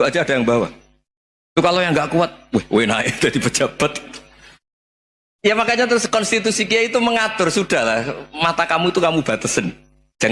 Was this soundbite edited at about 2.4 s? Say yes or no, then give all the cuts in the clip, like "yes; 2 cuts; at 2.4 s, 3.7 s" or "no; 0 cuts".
no; 0 cuts